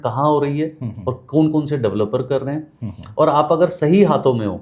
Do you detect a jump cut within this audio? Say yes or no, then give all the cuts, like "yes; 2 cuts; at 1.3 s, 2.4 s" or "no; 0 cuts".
no; 0 cuts